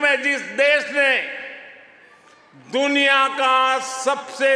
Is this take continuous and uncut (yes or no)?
yes